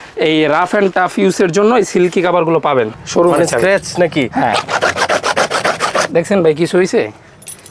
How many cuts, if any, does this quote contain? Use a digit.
1